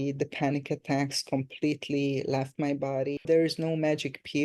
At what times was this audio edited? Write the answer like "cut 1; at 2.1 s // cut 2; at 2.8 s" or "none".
cut 1; at 3.2 s